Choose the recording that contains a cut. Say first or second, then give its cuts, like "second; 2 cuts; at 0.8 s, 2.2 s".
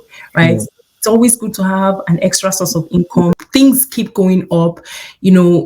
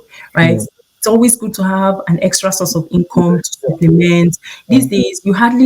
first; 1 cut; at 3.4 s